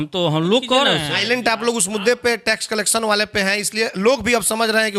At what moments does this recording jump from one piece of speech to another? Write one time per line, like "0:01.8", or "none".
0:01.1